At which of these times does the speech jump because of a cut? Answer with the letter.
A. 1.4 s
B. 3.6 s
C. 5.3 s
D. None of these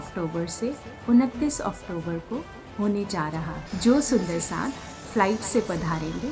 B